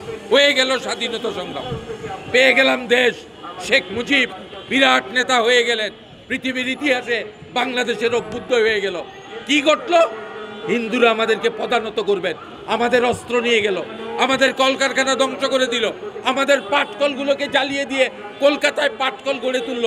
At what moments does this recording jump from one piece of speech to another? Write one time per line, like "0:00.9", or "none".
none